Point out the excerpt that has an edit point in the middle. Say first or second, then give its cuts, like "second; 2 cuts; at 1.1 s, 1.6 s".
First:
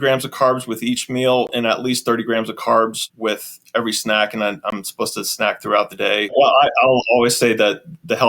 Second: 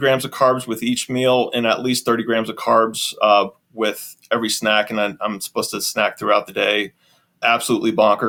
first; 2 cuts; at 3.0 s, 6.4 s